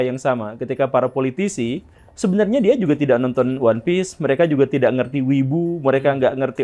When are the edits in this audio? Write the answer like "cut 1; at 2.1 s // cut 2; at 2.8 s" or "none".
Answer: none